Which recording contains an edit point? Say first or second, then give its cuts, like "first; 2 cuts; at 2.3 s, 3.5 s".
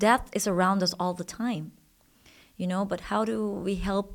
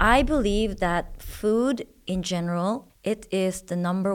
second; 1 cut; at 2.9 s